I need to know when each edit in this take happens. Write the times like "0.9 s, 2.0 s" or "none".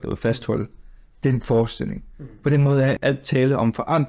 3.0 s